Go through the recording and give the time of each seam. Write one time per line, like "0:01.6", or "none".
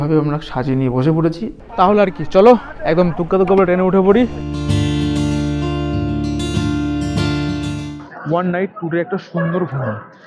0:01.6
0:04.4
0:07.9